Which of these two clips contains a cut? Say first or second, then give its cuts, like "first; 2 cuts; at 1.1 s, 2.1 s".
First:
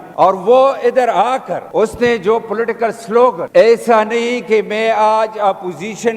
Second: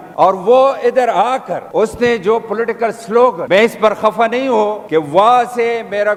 first; 1 cut; at 3.5 s